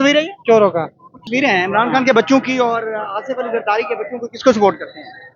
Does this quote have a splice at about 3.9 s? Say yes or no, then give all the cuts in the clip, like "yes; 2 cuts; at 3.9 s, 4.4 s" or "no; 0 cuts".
no; 1 cut; at 1.2 s